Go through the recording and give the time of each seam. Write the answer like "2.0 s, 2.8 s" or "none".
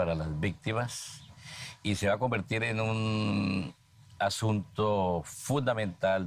none